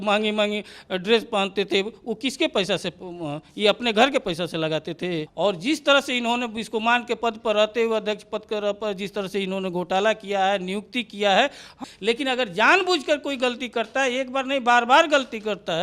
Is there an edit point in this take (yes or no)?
yes